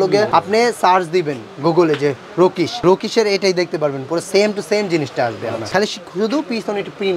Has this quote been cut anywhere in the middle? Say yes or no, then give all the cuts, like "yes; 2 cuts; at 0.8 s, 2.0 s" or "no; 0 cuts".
no; 0 cuts